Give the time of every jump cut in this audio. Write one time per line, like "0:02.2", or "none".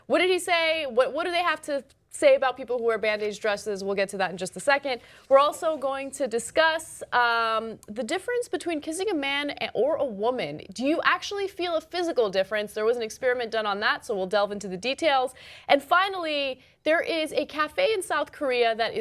0:09.6